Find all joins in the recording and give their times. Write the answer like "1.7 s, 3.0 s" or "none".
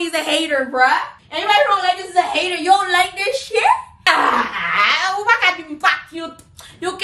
3.9 s